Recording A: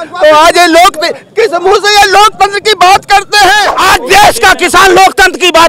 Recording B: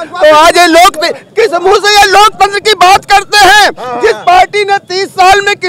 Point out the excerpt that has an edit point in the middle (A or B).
A